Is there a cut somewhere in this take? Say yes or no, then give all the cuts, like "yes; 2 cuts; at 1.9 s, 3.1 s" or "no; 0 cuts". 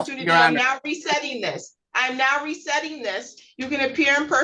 no; 0 cuts